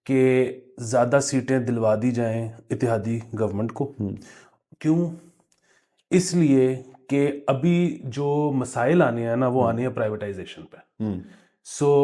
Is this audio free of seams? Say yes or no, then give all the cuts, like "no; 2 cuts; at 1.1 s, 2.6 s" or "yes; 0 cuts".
yes; 0 cuts